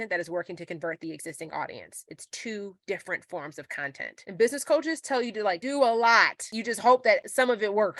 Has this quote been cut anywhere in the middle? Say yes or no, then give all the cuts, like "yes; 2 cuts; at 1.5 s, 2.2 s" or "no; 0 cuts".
yes; 1 cut; at 4.1 s